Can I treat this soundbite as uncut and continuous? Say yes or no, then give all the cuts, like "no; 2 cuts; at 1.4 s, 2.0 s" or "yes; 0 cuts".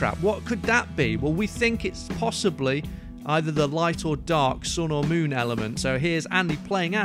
no; 1 cut; at 5.8 s